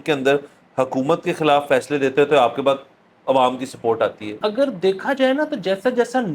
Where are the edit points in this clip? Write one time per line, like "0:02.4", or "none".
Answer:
0:04.4